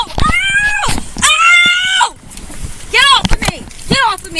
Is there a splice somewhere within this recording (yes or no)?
no